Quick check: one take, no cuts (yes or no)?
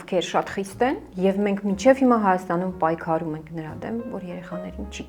yes